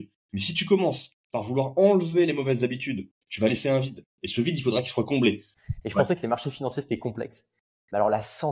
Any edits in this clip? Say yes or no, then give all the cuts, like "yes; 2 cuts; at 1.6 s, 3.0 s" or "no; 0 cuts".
yes; 2 cuts; at 3.2 s, 5.5 s